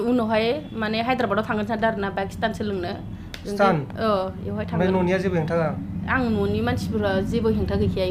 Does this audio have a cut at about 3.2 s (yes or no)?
no